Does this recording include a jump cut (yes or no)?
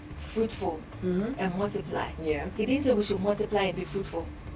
no